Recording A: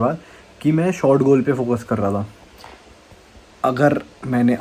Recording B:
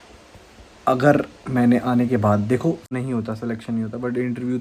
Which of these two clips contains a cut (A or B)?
B